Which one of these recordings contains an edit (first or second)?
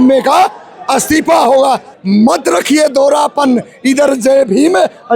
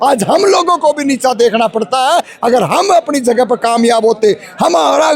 first